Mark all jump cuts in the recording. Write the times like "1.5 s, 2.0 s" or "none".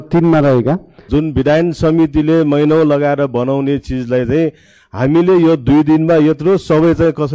1.1 s